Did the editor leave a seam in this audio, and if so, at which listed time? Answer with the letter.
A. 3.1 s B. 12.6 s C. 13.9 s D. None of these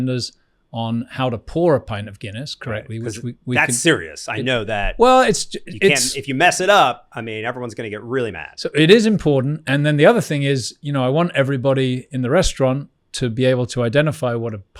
D